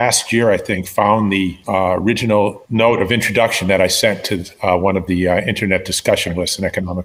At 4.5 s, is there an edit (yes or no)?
no